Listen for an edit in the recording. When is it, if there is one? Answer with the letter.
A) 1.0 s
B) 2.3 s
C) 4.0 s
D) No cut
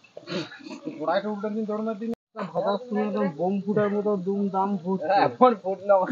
B